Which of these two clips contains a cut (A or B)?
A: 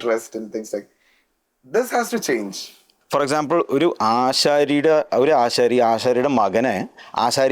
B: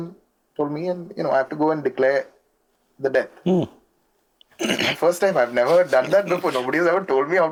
A